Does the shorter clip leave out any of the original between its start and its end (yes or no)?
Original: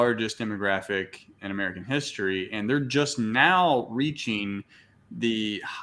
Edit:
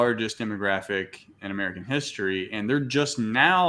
no